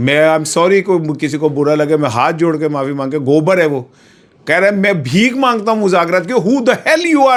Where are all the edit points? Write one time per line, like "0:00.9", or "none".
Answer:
none